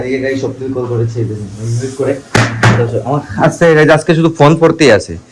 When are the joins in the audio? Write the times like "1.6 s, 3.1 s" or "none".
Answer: none